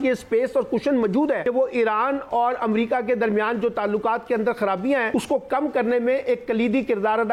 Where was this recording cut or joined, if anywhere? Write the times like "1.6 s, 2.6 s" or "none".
1.4 s, 5.1 s